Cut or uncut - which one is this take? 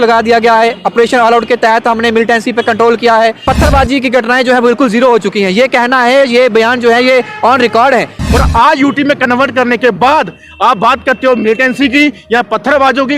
cut